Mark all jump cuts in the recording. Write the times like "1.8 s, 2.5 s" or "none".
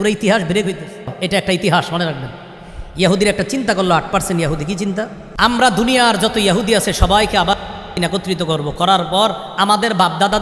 1.2 s, 5.2 s